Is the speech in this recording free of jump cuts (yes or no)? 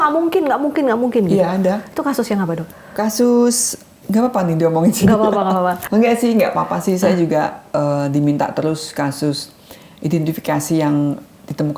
yes